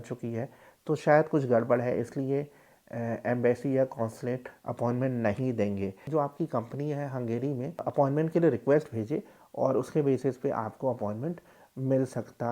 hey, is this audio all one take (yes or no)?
no